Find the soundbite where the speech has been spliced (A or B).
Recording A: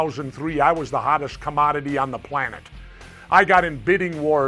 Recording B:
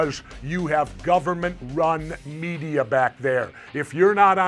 A